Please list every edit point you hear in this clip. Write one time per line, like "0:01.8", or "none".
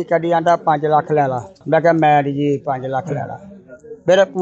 0:01.6

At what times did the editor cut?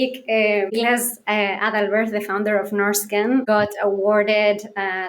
0:00.7
0:03.4

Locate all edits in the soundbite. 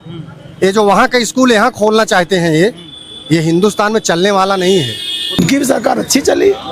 0:05.4

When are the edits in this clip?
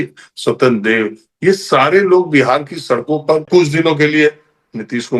0:03.5

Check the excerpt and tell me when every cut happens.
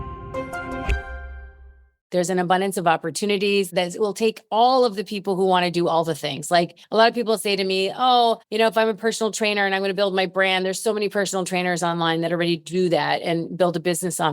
0:02.0

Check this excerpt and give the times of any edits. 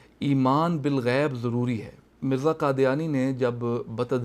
0:02.1

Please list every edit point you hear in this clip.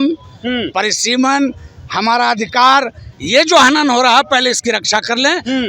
none

